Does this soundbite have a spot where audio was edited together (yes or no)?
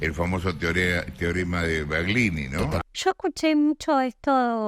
yes